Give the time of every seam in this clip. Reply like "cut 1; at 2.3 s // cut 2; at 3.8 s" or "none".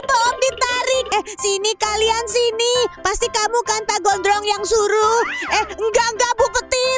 cut 1; at 1.1 s